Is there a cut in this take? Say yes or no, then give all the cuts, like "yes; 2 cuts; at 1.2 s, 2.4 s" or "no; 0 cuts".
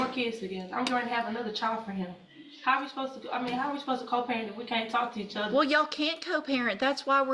yes; 1 cut; at 2.2 s